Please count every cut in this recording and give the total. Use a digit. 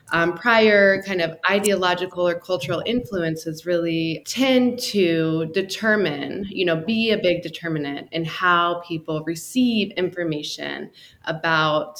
1